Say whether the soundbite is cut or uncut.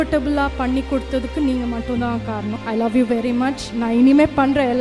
cut